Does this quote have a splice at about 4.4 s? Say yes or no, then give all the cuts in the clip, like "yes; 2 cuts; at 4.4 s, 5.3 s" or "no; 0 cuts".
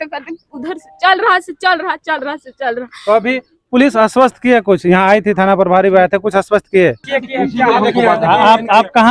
no; 1 cut; at 7.1 s